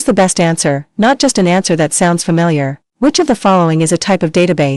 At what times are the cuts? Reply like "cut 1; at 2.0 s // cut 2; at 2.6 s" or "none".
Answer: none